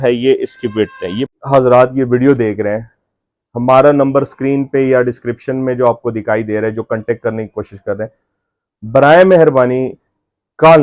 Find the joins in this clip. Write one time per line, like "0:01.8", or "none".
0:01.3